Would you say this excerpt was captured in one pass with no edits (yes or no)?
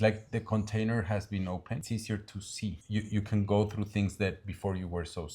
no